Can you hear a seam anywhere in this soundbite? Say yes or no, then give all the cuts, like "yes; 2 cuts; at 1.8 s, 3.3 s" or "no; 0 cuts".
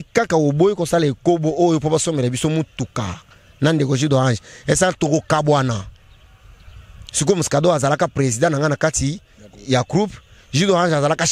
no; 0 cuts